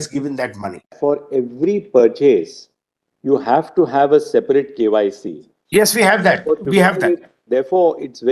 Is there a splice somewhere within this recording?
yes; 1 cut; at 0.9 s

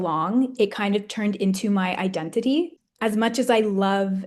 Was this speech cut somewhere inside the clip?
yes; 1 cut; at 2.8 s

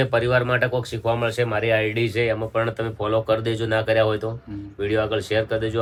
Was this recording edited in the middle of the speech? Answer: no; 0 cuts

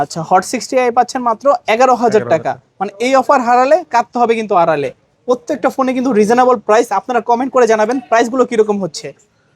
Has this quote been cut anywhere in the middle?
no; 0 cuts

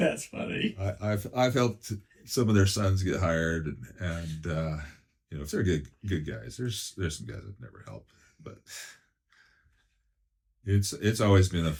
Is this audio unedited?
yes; 0 cuts

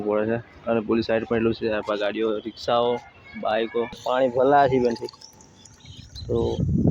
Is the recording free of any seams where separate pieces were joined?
no; 1 cut; at 4.0 s

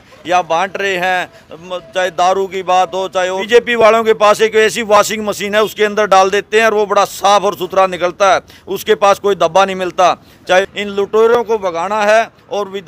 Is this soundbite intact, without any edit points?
no; 2 cuts; at 3.4 s, 10.7 s

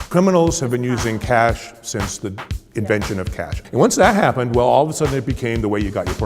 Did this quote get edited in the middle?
yes; 1 cut; at 3.5 s

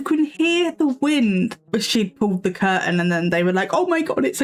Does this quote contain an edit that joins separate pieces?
yes; 1 cut; at 1.6 s

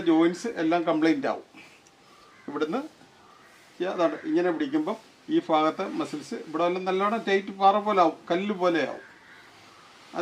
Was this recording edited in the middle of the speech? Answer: yes; 1 cut; at 8.5 s

